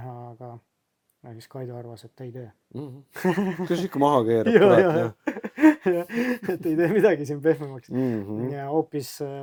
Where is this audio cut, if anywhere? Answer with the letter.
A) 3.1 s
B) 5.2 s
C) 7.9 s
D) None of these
D